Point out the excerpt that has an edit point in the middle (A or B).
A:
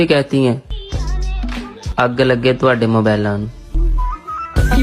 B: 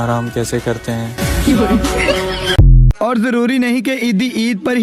B